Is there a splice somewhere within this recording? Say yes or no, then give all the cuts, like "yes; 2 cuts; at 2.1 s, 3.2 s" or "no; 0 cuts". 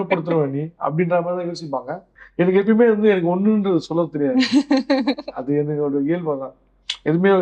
yes; 1 cut; at 2.2 s